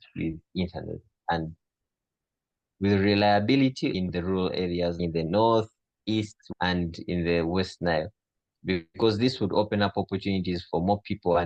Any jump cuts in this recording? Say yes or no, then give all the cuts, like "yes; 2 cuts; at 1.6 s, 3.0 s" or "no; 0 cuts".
no; 0 cuts